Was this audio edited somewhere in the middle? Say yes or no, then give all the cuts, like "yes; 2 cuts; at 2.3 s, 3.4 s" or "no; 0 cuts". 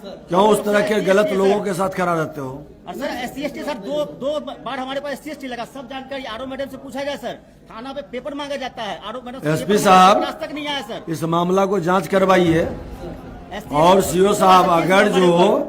no; 0 cuts